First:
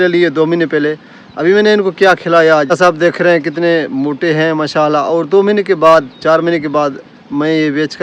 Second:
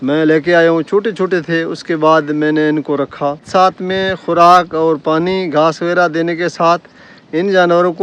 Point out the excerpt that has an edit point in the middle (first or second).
second